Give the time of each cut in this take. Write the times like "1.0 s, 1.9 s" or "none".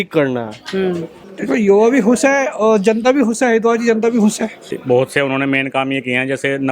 1.3 s, 4.6 s